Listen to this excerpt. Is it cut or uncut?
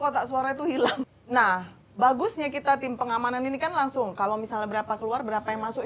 cut